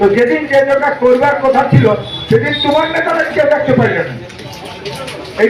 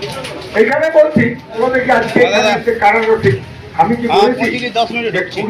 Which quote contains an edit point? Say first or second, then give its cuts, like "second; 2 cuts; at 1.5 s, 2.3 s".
second; 1 cut; at 1.6 s